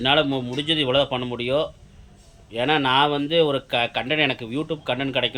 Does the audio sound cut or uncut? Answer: uncut